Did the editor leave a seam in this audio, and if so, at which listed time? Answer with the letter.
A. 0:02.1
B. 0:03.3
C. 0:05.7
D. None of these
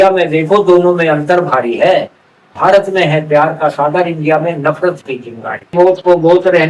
C